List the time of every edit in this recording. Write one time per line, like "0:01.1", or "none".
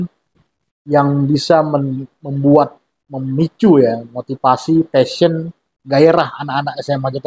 none

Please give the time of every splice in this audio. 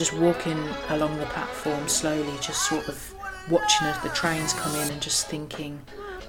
none

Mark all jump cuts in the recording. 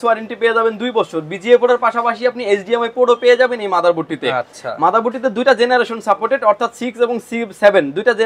none

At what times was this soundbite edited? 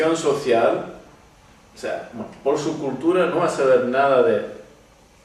none

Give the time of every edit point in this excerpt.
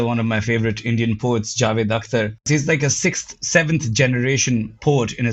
0:02.5

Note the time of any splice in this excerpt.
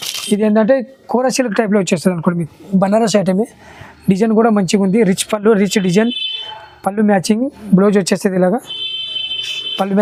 none

